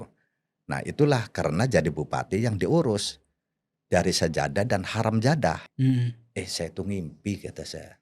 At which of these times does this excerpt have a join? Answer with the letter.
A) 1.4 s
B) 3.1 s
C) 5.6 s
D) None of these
C